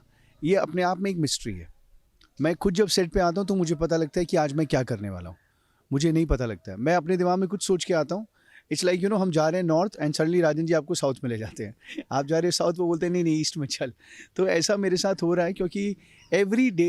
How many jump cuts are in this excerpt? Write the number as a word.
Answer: zero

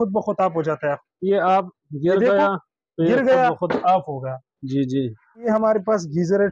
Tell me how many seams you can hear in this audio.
one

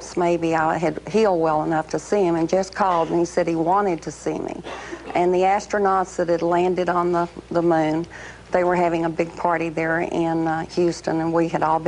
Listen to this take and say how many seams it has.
one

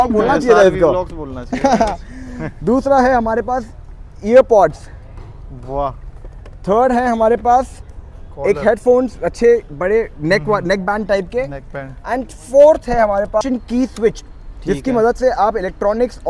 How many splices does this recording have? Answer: one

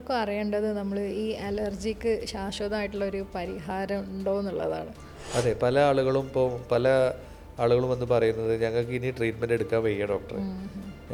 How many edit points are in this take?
zero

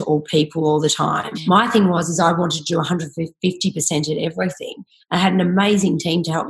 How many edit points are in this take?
one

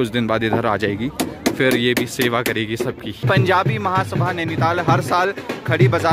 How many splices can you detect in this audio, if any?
one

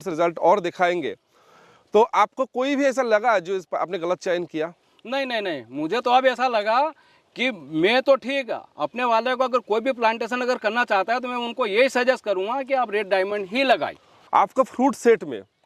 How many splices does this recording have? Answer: one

